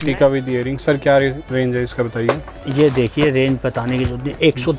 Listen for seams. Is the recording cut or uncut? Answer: uncut